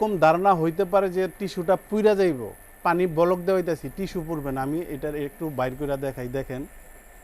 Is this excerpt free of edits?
no; 1 cut; at 2.7 s

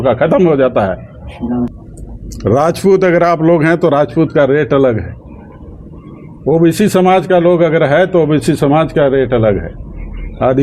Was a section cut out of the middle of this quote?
yes; 1 cut; at 1.8 s

